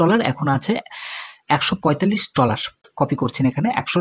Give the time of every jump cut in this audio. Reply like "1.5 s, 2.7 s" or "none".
2.9 s